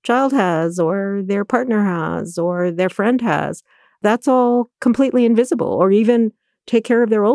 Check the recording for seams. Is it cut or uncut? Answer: cut